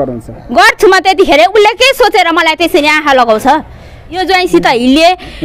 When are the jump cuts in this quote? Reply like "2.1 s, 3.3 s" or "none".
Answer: 4.2 s